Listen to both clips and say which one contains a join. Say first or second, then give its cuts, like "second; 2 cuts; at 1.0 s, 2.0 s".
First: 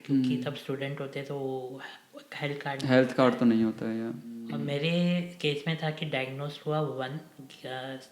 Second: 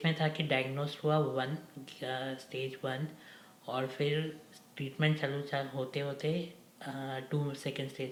first; 1 cut; at 4.5 s